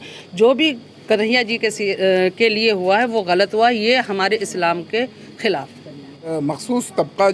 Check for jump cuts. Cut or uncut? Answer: cut